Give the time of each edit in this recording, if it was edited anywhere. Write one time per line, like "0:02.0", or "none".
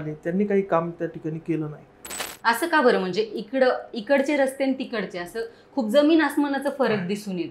0:02.2